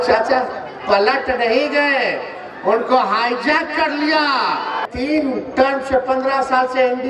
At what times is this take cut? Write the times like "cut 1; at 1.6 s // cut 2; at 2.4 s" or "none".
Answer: cut 1; at 4.8 s

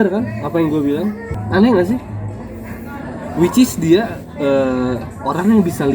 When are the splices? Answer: cut 1; at 1.3 s

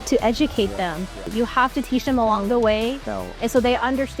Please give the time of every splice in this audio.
cut 1; at 1.2 s

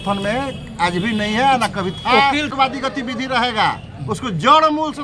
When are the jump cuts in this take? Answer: cut 1; at 2.5 s

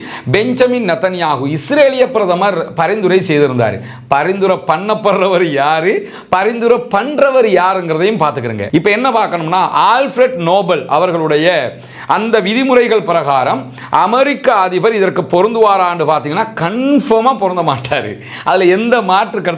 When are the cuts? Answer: cut 1; at 8.5 s

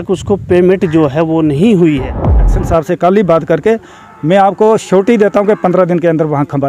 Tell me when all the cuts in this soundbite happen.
cut 1; at 2.4 s

